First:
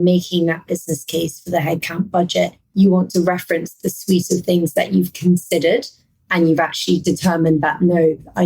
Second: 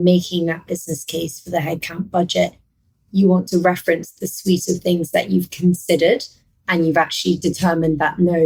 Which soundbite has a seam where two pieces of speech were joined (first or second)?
first